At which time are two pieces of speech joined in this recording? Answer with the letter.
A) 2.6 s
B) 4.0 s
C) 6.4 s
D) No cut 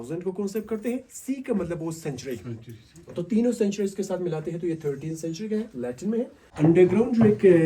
C